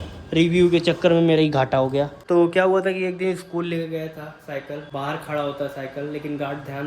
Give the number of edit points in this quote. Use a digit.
2